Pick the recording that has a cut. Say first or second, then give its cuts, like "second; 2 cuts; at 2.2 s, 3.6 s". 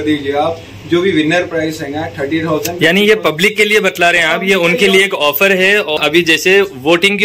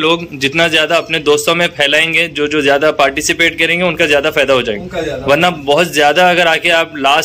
first; 1 cut; at 6.0 s